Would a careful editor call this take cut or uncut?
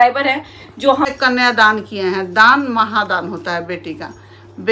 cut